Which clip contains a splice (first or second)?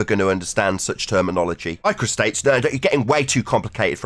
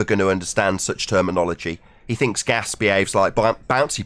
first